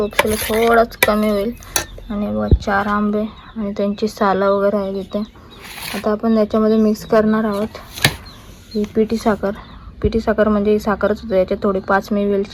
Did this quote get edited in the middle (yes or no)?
no